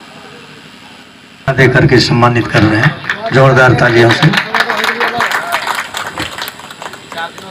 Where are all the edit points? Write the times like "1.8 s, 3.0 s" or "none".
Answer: 1.3 s